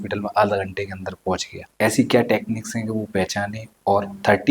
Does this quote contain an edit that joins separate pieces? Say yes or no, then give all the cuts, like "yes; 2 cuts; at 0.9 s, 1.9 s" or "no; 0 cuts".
yes; 1 cut; at 1.6 s